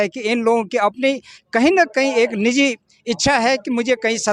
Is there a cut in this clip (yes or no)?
no